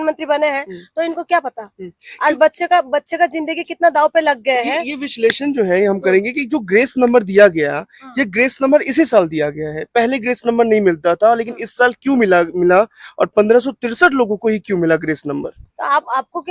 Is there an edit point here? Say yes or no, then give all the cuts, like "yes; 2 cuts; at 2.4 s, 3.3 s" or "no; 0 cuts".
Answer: no; 0 cuts